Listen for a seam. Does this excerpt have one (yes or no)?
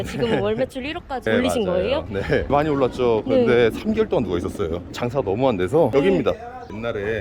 yes